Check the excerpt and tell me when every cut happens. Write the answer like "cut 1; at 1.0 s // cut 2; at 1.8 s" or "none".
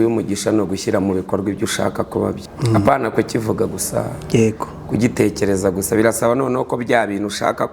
cut 1; at 2.5 s